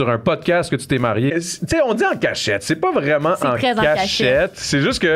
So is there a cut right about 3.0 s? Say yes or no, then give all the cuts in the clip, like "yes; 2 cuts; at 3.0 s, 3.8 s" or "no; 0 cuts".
no; 1 cut; at 1.3 s